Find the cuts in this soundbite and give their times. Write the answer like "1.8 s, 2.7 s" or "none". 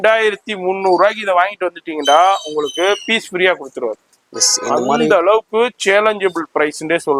none

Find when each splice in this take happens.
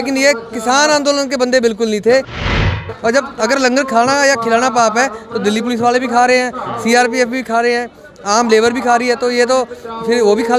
2.6 s

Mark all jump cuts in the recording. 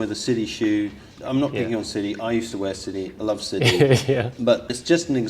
1.1 s, 4.3 s

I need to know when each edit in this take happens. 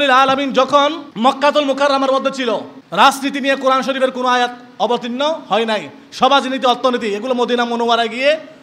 1.1 s, 2.8 s

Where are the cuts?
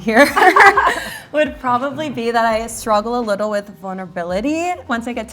none

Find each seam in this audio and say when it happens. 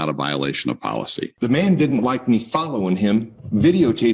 1.3 s

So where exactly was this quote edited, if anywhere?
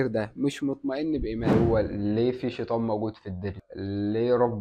1.5 s

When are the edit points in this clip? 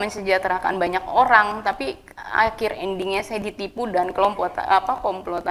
none

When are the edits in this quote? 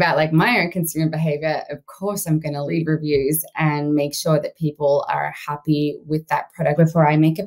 2.7 s, 6.8 s

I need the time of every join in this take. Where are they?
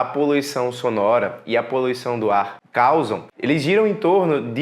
2.6 s, 3.3 s

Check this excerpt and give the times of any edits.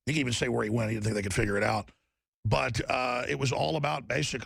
none

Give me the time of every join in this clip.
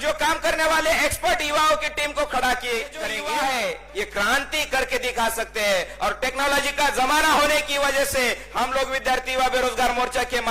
3.1 s

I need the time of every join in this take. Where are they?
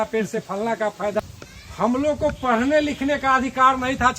1.2 s

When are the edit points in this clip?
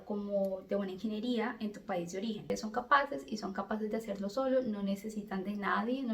2.5 s

